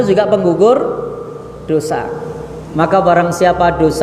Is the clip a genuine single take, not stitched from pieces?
yes; 0 cuts

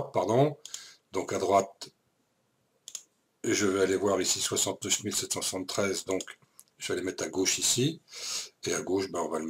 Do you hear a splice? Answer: no; 0 cuts

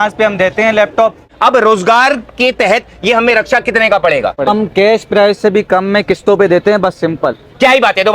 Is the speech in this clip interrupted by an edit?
yes; 2 cuts; at 1.3 s, 4.4 s

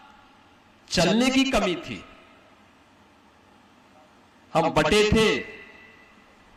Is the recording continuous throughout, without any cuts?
yes; 0 cuts

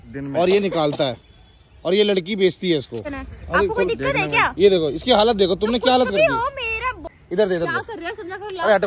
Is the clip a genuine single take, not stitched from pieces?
no; 2 cuts; at 3.1 s, 7.0 s

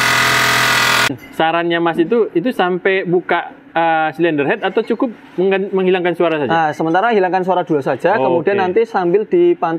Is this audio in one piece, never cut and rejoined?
no; 1 cut; at 1.1 s

